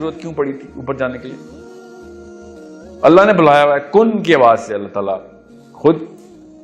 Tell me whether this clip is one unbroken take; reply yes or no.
no